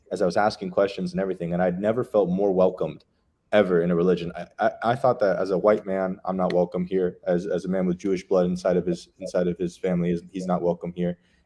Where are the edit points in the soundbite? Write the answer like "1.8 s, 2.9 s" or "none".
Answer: none